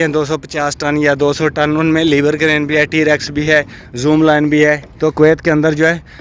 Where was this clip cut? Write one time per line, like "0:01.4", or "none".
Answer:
0:04.9